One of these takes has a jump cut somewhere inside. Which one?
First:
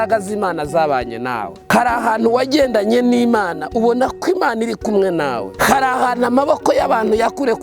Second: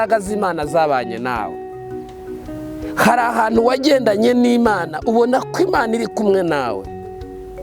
first; 2 cuts; at 1.7 s, 5.5 s

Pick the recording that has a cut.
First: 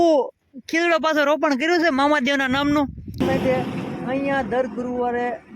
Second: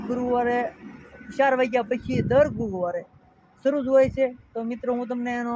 first; 1 cut; at 3.2 s

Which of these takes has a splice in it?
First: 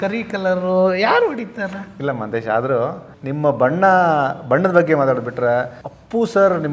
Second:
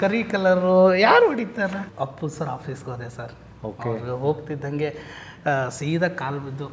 second; 1 cut; at 1.8 s

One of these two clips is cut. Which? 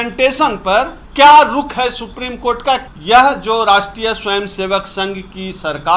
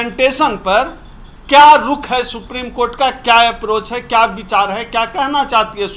first; 2 cuts; at 1.0 s, 2.8 s

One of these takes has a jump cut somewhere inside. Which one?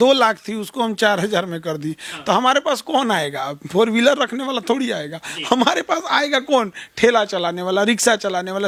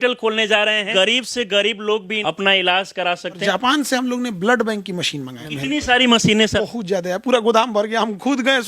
second; 5 cuts; at 0.9 s, 2.1 s, 3.4 s, 5.4 s, 6.6 s

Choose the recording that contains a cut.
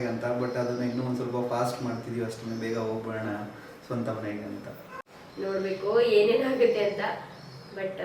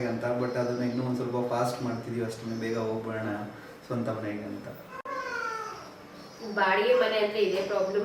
first; 1 cut; at 4.9 s

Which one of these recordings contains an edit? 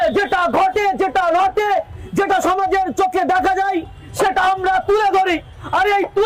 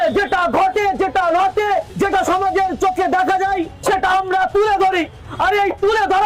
second; 2 cuts; at 1.9 s, 3.7 s

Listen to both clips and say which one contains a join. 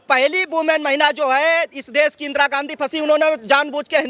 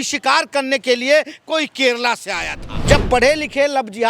second; 1 cut; at 2.9 s

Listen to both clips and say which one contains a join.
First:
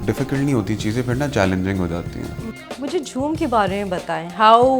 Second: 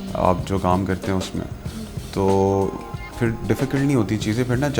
first; 1 cut; at 2.4 s

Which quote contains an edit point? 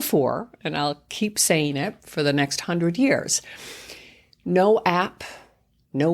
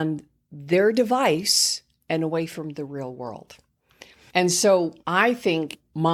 first; 1 cut; at 2.0 s

